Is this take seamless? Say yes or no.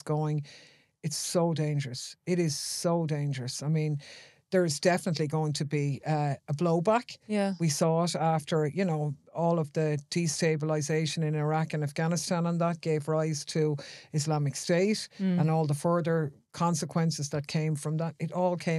yes